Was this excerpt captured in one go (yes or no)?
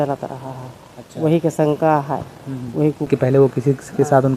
no